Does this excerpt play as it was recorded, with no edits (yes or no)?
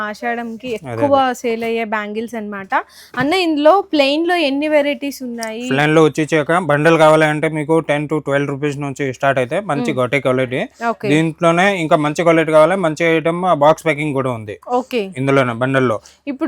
yes